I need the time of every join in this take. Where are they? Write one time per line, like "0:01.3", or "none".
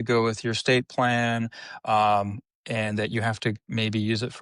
none